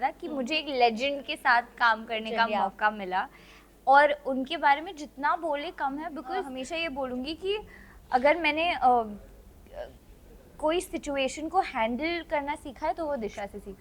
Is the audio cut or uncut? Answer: cut